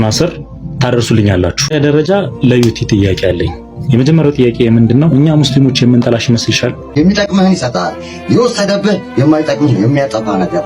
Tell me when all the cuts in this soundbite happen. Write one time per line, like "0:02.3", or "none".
0:01.7
0:06.8